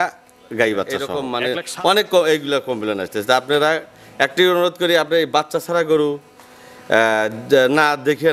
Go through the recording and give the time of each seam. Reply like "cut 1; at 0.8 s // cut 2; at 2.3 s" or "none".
cut 1; at 1.2 s